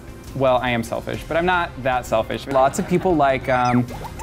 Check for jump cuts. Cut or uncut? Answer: cut